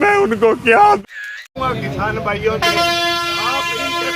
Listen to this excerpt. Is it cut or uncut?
cut